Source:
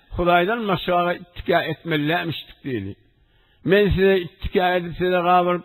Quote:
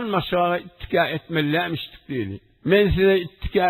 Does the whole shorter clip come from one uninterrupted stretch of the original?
no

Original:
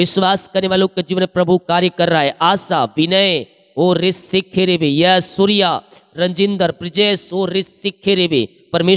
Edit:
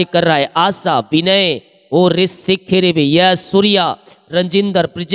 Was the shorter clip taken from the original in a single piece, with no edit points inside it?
yes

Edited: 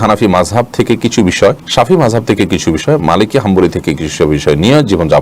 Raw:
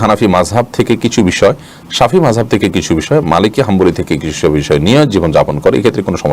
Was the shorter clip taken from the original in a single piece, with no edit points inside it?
no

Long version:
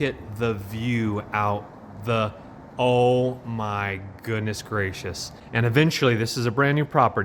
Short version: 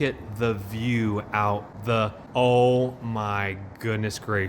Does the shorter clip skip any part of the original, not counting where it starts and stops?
yes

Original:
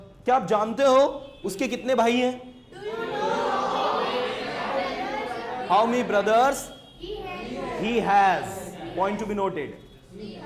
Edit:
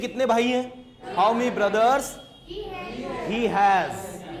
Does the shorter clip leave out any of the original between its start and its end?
yes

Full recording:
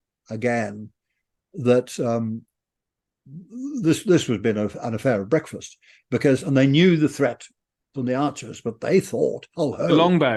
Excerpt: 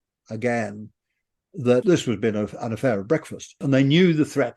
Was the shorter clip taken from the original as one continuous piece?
no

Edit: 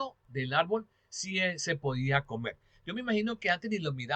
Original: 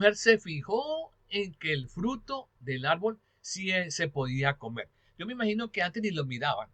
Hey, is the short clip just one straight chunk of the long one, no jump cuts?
yes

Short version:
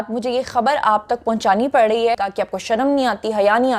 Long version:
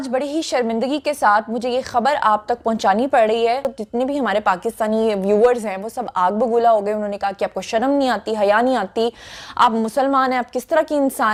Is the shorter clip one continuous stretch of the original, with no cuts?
no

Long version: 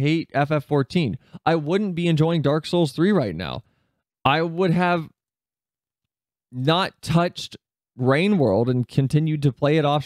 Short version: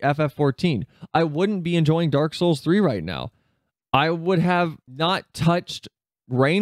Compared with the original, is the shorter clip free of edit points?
no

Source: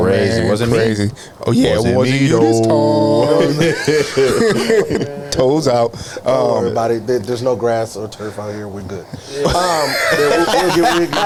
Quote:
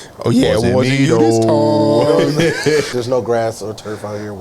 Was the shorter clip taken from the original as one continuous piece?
no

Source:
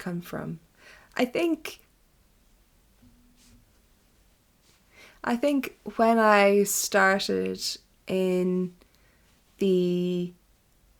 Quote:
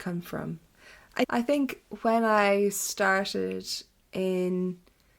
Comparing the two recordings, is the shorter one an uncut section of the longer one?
no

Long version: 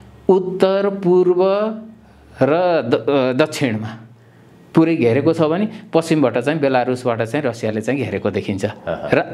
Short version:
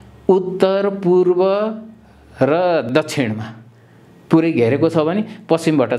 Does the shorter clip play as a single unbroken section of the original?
no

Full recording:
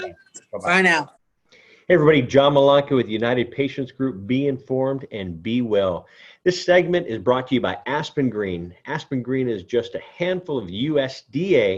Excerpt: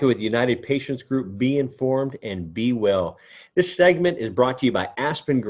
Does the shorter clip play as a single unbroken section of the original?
yes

